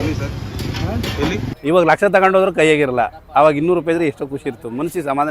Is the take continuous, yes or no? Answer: no